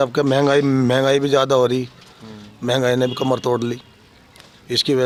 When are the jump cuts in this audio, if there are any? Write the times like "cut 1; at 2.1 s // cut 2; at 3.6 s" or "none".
none